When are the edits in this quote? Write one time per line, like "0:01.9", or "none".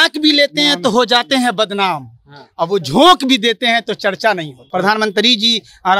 0:04.6